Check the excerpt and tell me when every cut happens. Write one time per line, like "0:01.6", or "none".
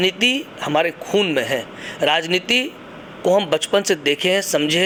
none